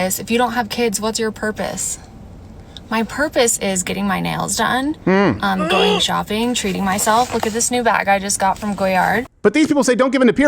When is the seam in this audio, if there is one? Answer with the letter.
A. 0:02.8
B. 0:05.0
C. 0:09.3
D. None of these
C